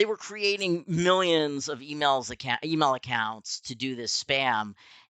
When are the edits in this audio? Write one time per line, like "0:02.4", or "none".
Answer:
none